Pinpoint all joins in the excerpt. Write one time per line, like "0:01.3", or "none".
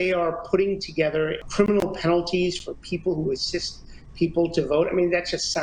0:01.4